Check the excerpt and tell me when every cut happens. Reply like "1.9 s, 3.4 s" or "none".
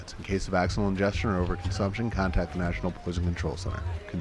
none